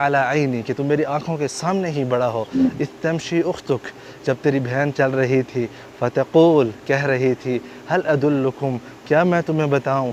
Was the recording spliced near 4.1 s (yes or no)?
no